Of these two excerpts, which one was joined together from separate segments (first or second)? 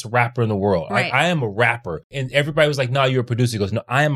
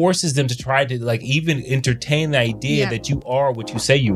first